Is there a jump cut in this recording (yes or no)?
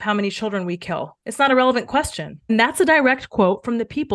no